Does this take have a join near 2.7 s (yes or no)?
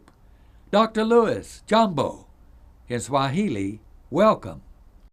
yes